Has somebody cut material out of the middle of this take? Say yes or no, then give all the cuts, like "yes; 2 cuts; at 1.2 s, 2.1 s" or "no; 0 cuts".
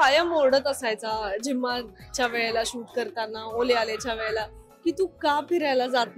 no; 0 cuts